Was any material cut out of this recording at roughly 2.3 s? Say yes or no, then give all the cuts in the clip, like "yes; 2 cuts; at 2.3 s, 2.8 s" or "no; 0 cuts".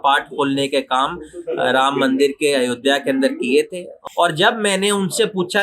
no; 1 cut; at 3.9 s